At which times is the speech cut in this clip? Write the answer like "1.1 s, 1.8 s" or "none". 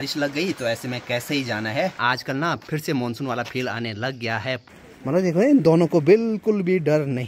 2.0 s, 4.7 s